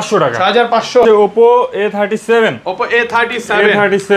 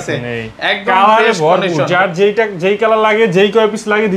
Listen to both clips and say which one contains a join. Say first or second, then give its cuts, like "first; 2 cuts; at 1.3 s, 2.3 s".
first; 1 cut; at 1.0 s